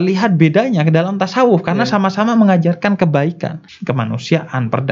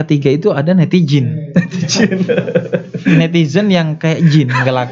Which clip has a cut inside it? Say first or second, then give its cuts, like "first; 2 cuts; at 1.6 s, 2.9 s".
first; 1 cut; at 3.7 s